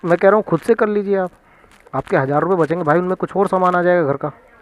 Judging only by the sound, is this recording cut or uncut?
uncut